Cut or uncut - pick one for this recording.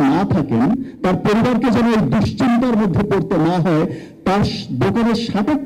uncut